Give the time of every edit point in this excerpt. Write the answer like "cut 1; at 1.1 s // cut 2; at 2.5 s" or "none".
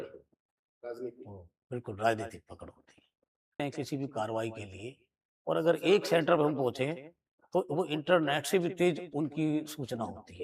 cut 1; at 3.6 s